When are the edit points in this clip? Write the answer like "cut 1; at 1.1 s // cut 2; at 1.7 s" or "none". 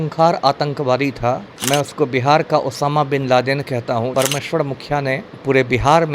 cut 1; at 1.5 s // cut 2; at 4.1 s